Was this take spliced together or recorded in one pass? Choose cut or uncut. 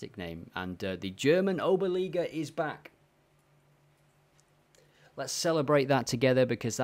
uncut